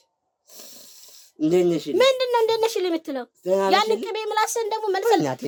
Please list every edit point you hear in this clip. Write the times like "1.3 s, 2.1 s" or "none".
none